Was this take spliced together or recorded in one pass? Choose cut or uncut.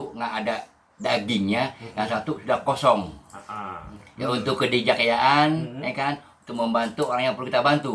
cut